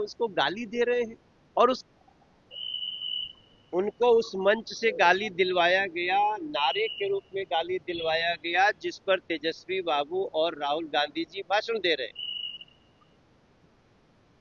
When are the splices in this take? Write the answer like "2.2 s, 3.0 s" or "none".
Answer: 1.9 s